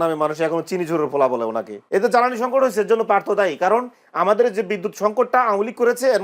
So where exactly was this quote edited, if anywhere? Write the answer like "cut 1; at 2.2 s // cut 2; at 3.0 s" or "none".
cut 1; at 1.8 s

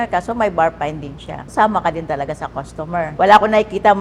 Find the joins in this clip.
cut 1; at 1.5 s // cut 2; at 3.1 s

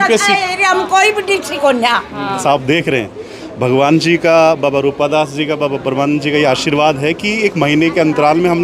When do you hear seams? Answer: cut 1; at 2.4 s

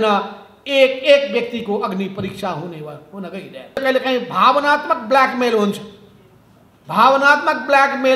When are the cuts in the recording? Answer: cut 1; at 3.8 s

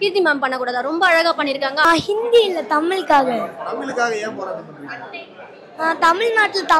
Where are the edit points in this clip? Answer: cut 1; at 1.8 s

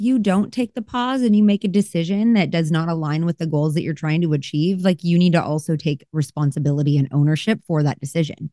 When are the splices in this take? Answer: none

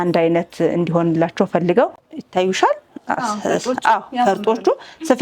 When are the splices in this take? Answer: cut 1; at 2.1 s

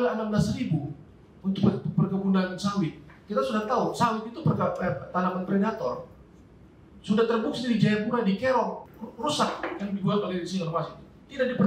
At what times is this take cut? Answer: cut 1; at 8.8 s

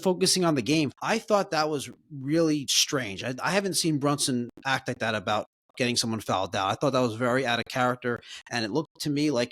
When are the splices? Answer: cut 1; at 0.9 s // cut 2; at 2.8 s

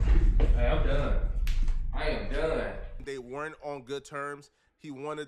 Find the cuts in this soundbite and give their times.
cut 1; at 2.9 s

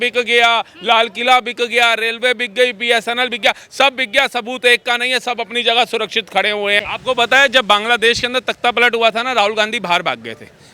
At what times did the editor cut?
cut 1; at 6.9 s

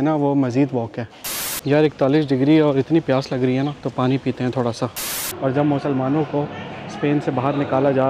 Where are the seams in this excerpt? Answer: cut 1; at 1.5 s // cut 2; at 3.8 s // cut 3; at 5.3 s

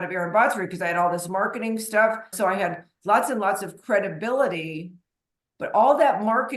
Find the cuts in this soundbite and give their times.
cut 1; at 2.3 s

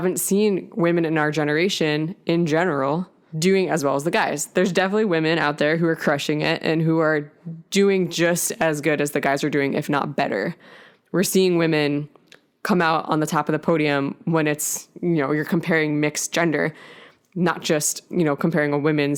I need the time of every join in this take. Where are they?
none

